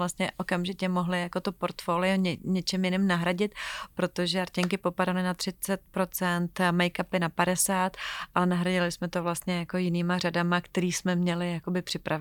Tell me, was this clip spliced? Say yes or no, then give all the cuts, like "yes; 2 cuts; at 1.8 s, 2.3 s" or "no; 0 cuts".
no; 0 cuts